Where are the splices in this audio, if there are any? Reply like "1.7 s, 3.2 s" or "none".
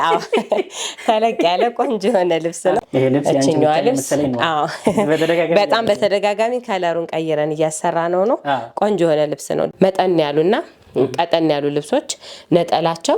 2.8 s, 9.7 s